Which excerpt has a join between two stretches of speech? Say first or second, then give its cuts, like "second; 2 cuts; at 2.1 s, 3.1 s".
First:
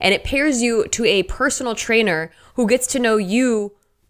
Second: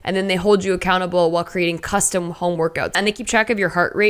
second; 1 cut; at 3.0 s